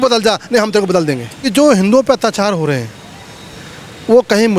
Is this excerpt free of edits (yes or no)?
no